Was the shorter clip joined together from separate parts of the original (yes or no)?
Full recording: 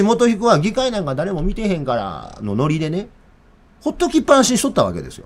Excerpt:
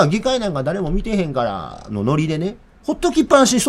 yes